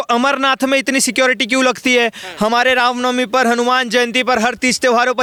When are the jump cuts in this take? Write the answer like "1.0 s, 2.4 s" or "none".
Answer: none